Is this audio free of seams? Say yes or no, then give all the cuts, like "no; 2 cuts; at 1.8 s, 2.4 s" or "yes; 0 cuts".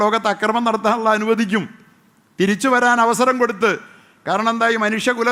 yes; 0 cuts